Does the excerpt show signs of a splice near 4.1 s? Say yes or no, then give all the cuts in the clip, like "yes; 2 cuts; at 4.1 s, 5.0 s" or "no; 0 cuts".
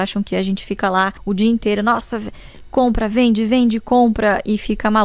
no; 1 cut; at 1.2 s